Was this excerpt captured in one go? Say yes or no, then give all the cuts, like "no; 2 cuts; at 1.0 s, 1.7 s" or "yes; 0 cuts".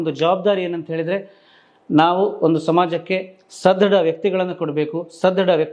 yes; 0 cuts